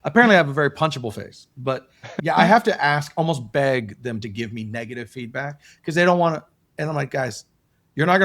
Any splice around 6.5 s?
no; 0 cuts

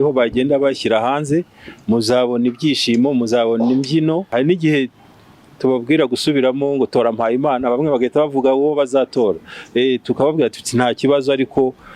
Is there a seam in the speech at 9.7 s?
no; 1 cut; at 4.3 s

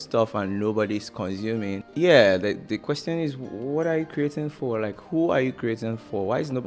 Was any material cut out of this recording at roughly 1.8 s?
yes; 1 cut; at 1.8 s

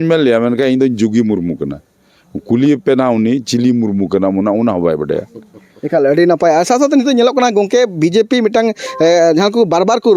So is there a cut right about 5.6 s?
no; 0 cuts

